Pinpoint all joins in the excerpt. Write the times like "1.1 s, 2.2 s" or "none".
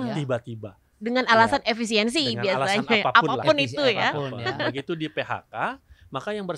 none